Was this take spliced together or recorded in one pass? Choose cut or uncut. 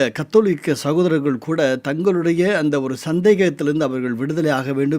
uncut